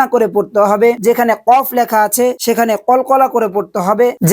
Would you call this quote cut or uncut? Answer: uncut